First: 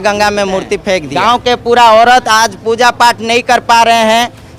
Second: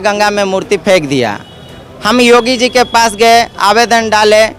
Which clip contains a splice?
first; 1 cut; at 1.1 s

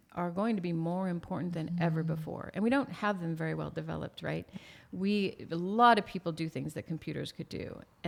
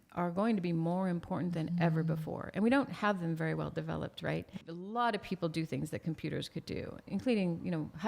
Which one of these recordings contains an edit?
second; 2 cuts; at 4.6 s, 7.1 s

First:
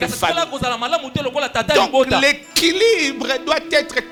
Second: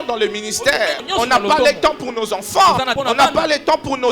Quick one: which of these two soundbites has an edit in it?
second; 2 cuts; at 1.0 s, 2.9 s

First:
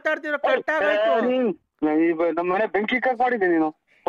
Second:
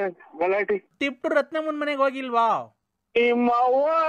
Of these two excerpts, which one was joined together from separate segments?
second; 1 cut; at 0.9 s

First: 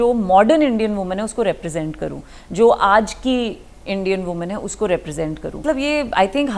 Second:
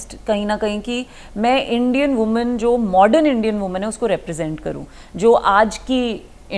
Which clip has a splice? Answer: first; 1 cut; at 5.6 s

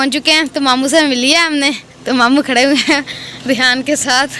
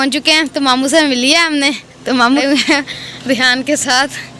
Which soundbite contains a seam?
second; 1 cut; at 2.4 s

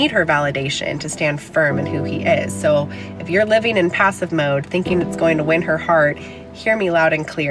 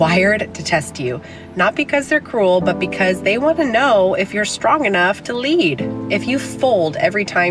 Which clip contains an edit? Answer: second; 2 cuts; at 1.3 s, 6.0 s

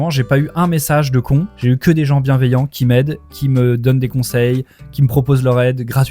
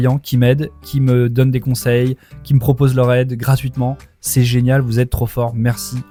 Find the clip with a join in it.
first; 1 cut; at 1.5 s

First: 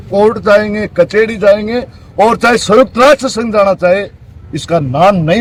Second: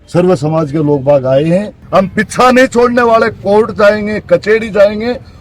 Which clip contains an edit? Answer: second; 1 cut; at 1.8 s

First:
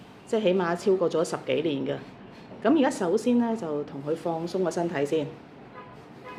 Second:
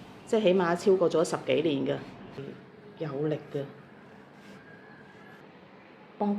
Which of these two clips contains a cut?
second; 2 cuts; at 2.4 s, 5.4 s

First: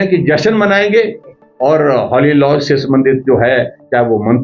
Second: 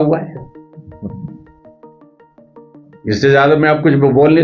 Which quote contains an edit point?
second; 2 cuts; at 1.4 s, 2.9 s

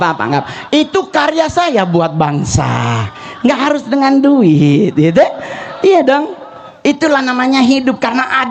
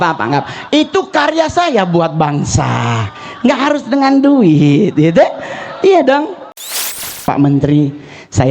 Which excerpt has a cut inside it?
second; 1 cut; at 6.8 s

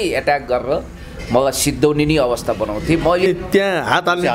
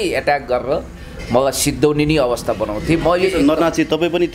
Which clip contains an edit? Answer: first; 1 cut; at 3.3 s

